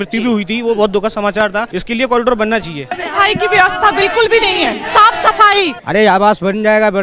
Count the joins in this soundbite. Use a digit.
3